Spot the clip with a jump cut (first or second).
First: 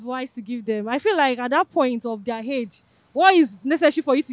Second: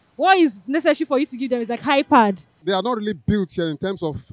second